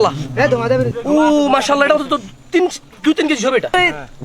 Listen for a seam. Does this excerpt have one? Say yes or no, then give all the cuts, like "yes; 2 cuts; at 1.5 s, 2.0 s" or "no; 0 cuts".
yes; 1 cut; at 0.9 s